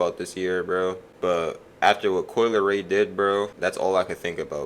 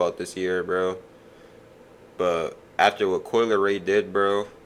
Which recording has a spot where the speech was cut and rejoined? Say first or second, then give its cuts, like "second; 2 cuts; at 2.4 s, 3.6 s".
first; 2 cuts; at 1.1 s, 3.5 s